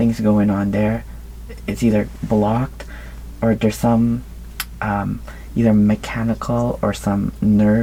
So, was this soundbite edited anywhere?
no; 0 cuts

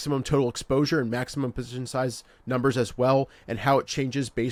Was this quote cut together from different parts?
no; 0 cuts

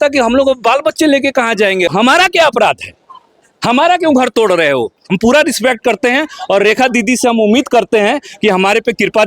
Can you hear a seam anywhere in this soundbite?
yes; 2 cuts; at 1.9 s, 5.0 s

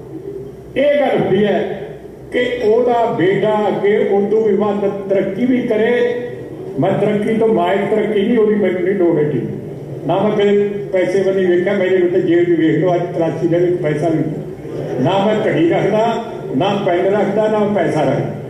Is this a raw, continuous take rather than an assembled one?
no; 1 cut; at 8.4 s

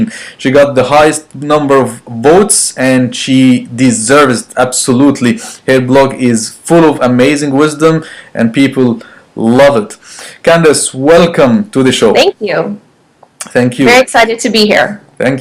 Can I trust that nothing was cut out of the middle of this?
no; 1 cut; at 9.1 s

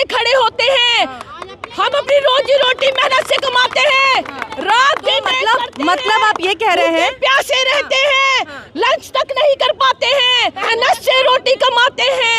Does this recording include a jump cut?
yes; 1 cut; at 10.6 s

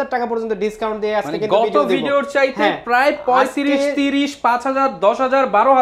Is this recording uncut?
yes; 0 cuts

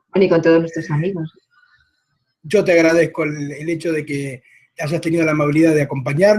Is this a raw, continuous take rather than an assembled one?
no; 1 cut; at 2.6 s

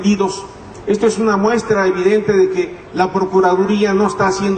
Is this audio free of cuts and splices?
no; 1 cut; at 2.2 s

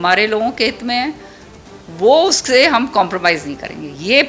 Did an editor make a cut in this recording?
no; 0 cuts

